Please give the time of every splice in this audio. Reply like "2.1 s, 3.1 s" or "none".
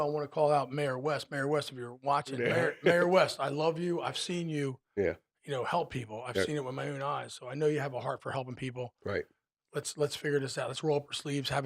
2.4 s